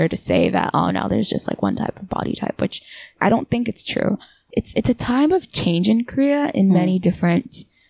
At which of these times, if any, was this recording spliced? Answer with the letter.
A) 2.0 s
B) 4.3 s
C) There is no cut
B